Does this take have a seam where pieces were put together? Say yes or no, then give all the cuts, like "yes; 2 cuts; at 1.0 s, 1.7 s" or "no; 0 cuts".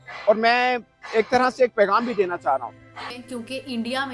yes; 1 cut; at 3.2 s